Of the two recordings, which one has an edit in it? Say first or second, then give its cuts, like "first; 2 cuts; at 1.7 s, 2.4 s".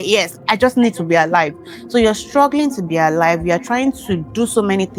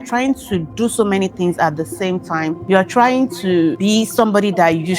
second; 2 cuts; at 2.6 s, 3.8 s